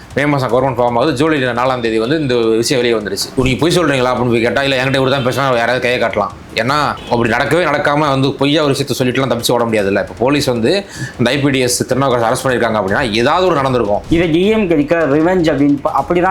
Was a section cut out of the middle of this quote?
yes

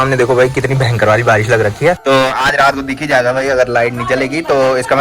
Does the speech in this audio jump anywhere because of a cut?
yes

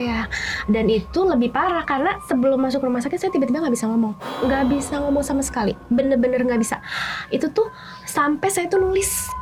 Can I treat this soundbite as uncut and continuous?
yes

